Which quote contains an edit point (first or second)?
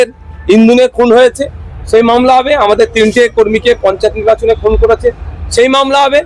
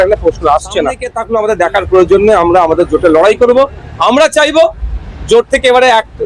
second